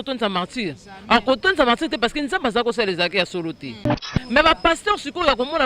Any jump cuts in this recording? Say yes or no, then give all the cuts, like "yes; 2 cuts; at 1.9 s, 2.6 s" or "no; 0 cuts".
yes; 1 cut; at 4.1 s